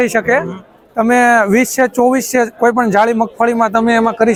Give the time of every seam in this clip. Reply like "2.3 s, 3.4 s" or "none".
none